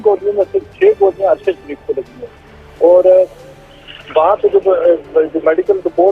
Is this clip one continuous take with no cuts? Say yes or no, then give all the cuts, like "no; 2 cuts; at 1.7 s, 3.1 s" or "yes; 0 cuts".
yes; 0 cuts